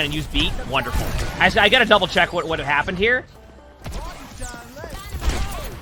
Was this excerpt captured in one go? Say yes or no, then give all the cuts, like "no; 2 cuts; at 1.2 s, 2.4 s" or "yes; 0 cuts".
no; 2 cuts; at 1.2 s, 3.3 s